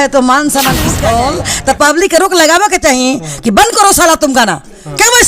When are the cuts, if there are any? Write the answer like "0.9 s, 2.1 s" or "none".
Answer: 0.9 s